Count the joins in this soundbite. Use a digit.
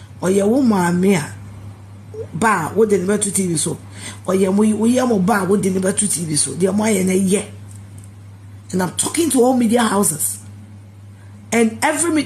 0